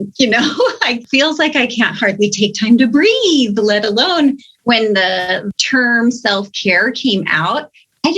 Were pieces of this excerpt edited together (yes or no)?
yes